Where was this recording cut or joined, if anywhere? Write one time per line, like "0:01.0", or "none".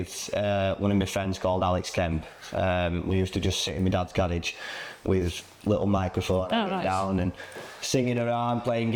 none